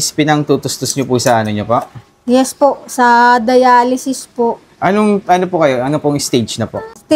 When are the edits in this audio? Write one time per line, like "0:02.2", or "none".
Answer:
none